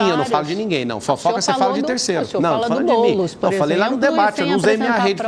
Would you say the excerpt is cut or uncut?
uncut